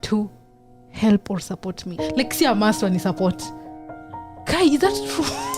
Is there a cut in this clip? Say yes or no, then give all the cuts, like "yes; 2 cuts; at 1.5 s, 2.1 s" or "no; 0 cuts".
yes; 1 cut; at 1.9 s